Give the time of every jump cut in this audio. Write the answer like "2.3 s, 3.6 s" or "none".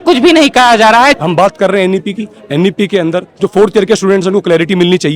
1.1 s